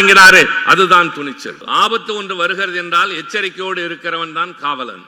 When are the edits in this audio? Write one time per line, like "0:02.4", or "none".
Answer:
0:01.6

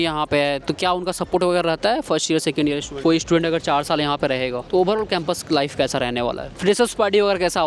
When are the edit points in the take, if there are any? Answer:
0:03.0
0:04.6
0:06.5

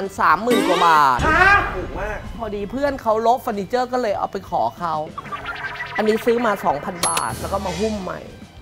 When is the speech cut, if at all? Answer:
0:02.3
0:05.8

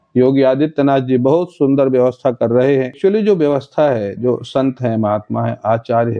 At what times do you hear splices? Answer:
0:02.9

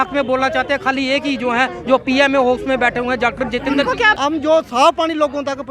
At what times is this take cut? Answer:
0:04.2

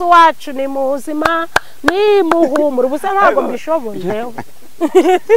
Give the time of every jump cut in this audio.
0:04.1

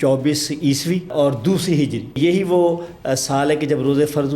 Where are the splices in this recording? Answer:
0:01.1
0:02.2

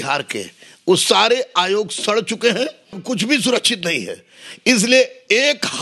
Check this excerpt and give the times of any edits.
0:03.0

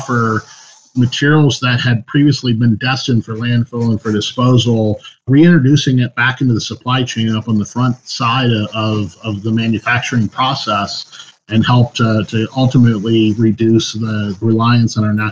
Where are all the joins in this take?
0:14.4

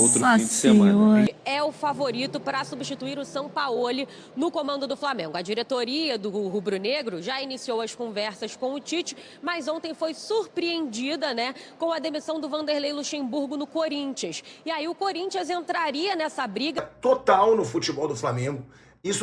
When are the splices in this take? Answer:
0:01.3
0:16.9

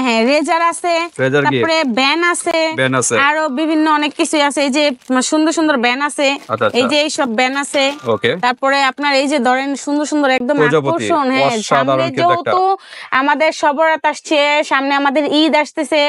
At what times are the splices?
none

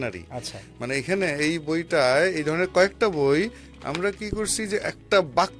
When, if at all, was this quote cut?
none

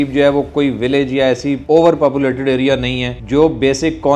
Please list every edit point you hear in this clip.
0:01.6
0:03.1

